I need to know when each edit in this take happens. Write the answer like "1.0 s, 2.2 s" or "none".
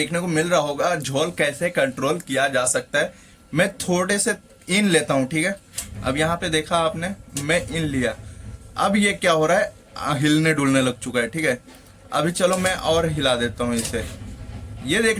none

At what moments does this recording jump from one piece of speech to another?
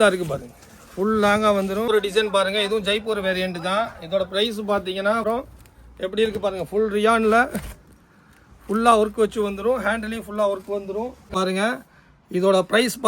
1.9 s, 5.2 s, 11.3 s

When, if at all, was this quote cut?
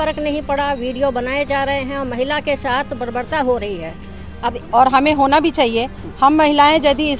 4.5 s

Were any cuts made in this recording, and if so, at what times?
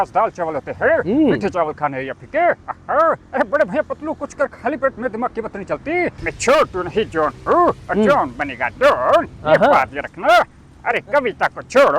6.2 s

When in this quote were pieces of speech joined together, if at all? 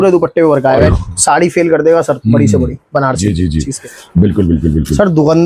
0.9 s, 3.8 s

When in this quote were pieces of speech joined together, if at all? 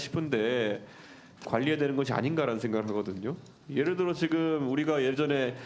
1.4 s

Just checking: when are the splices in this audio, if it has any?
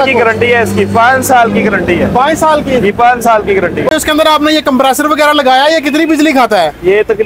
3.9 s

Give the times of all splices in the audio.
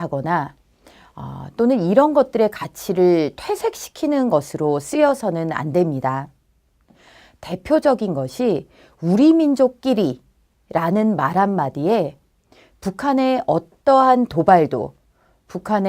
2.9 s

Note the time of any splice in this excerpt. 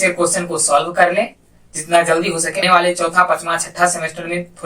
2.6 s

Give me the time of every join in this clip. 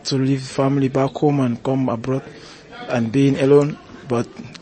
none

